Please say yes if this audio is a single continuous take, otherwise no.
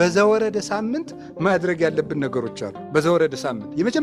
yes